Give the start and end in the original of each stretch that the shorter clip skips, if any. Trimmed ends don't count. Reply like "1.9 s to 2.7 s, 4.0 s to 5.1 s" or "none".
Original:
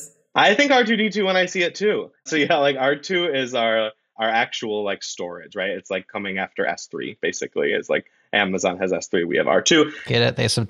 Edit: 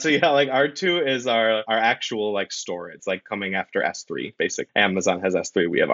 3.9 s to 4.2 s, 5.5 s to 5.8 s, 7.4 s to 8.2 s